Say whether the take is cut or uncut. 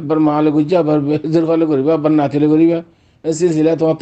uncut